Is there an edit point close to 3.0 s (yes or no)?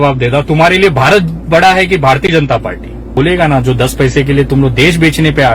yes